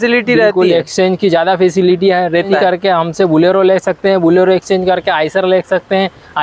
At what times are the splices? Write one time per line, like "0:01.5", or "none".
0:02.5